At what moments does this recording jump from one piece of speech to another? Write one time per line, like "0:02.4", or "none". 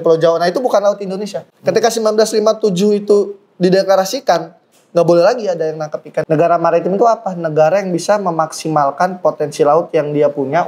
0:01.4
0:06.1